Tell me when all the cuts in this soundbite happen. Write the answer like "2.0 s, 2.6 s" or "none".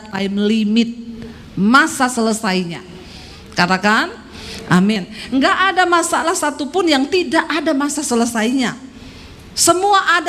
none